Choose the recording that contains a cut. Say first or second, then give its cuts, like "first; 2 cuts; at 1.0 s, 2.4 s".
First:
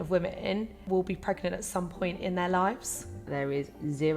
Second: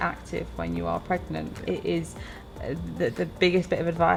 first; 2 cuts; at 0.8 s, 3.3 s